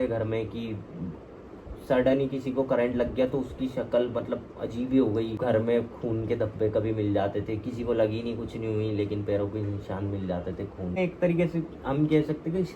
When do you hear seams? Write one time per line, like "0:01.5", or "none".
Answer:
0:05.3
0:11.0